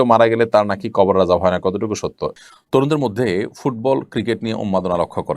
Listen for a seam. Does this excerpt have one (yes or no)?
yes